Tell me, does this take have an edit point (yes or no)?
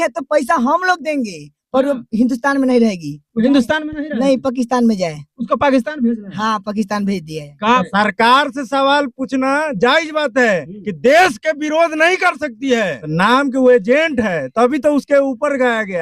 yes